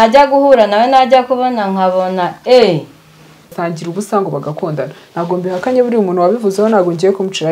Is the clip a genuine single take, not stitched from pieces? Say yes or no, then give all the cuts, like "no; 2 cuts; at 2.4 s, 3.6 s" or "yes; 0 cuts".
no; 1 cut; at 3.6 s